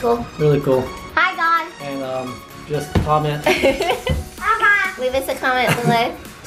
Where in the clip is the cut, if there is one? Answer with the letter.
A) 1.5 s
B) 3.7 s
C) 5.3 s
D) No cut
D